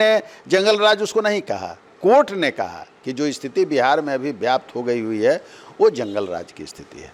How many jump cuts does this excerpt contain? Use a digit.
0